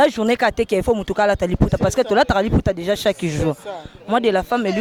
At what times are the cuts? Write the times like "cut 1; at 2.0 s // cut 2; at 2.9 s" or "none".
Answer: none